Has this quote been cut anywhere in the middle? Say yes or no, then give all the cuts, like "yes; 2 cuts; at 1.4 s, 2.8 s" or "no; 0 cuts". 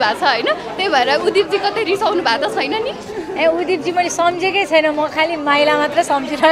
no; 0 cuts